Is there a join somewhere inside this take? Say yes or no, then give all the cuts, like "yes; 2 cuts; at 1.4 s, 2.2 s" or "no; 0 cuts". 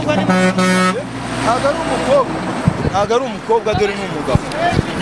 no; 0 cuts